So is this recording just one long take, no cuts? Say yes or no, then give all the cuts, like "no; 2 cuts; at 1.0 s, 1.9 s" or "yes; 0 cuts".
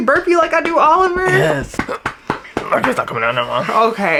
yes; 0 cuts